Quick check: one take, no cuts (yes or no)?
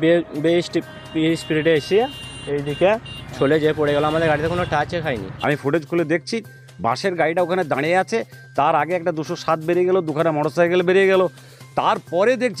no